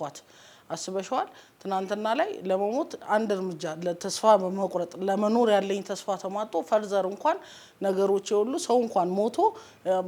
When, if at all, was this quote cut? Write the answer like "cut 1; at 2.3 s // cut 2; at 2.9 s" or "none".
none